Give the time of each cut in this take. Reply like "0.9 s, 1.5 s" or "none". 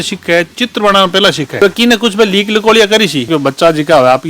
3.3 s